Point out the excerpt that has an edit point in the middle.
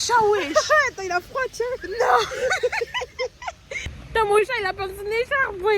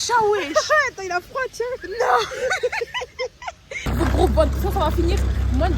second; 1 cut; at 3.8 s

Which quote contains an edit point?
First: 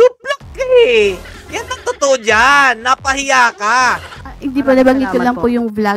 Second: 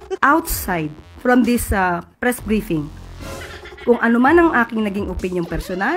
first; 1 cut; at 4.1 s

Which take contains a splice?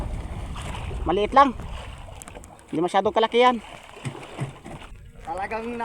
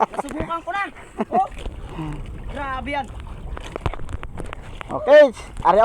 first; 1 cut; at 4.9 s

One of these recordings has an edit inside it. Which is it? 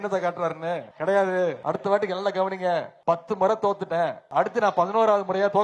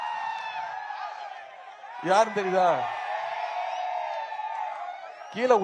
first; 4 cuts; at 0.9 s, 1.6 s, 2.9 s, 4.2 s

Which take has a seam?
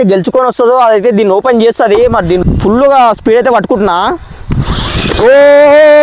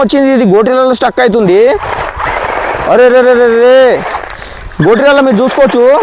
first; 1 cut; at 2.4 s

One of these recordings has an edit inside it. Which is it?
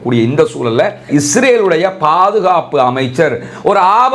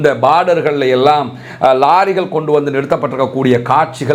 first; 1 cut; at 1.0 s

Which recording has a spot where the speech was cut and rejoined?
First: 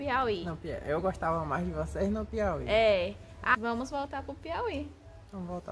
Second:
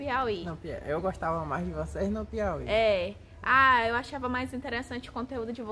first; 1 cut; at 3.5 s

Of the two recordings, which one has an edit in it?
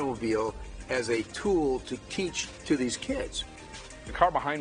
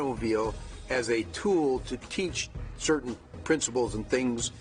first; 2 cuts; at 2.5 s, 3.4 s

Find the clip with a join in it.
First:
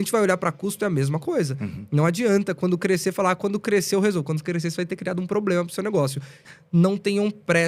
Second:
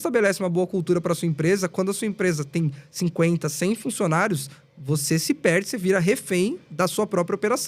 first; 1 cut; at 6.4 s

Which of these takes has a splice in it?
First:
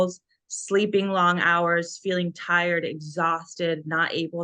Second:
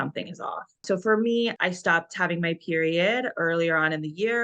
second; 1 cut; at 1.6 s

